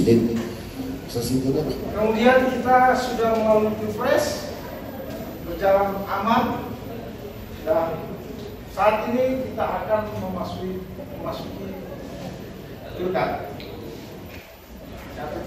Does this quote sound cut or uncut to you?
cut